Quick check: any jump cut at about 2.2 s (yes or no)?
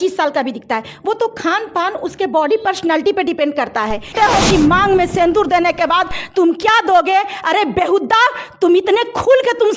no